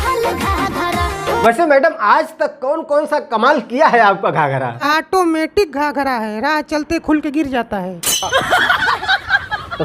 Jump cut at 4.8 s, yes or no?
yes